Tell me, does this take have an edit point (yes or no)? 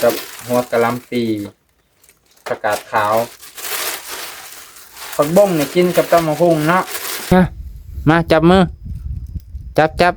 yes